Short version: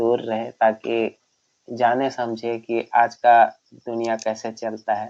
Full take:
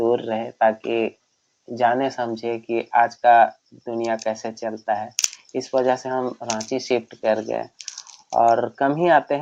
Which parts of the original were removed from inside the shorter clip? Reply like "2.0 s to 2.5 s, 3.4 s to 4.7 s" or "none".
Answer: none